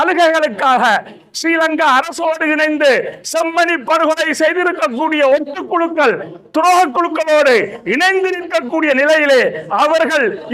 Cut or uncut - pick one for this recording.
uncut